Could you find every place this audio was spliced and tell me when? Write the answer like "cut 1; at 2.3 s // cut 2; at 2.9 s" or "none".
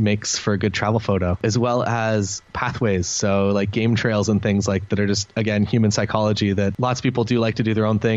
cut 1; at 1.4 s // cut 2; at 6.7 s

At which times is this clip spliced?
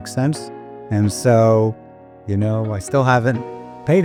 none

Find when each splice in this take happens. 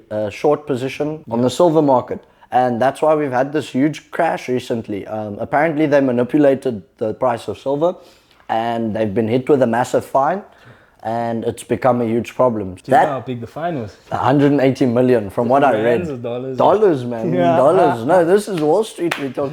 cut 1; at 1.2 s // cut 2; at 12.7 s // cut 3; at 14.0 s

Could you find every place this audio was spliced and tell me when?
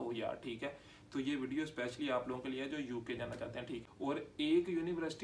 cut 1; at 3.8 s

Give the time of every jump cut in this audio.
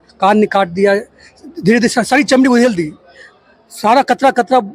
none

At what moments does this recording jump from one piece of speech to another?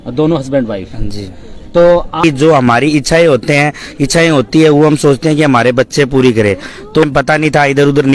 cut 1; at 2.2 s // cut 2; at 7.0 s

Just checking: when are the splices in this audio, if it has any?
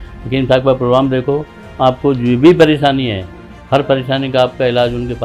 none

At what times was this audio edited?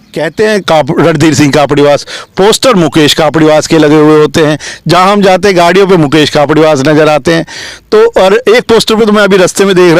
none

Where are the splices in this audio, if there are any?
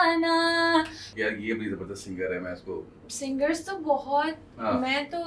cut 1; at 1.1 s

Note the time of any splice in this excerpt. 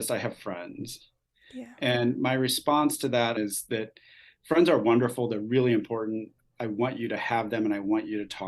cut 1; at 3.4 s

